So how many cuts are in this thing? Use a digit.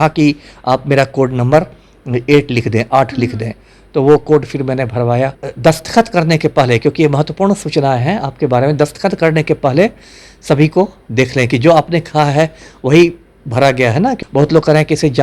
2